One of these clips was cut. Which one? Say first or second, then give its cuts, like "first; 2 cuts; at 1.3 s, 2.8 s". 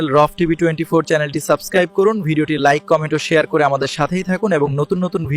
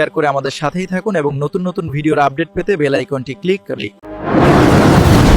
second; 1 cut; at 4.1 s